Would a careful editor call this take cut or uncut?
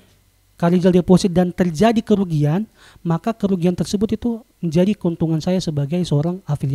uncut